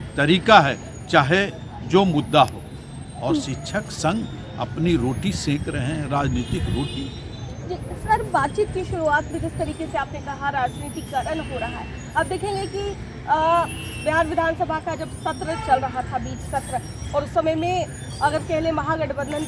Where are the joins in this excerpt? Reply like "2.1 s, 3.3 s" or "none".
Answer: none